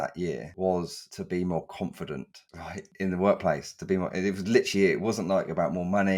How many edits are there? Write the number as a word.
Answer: zero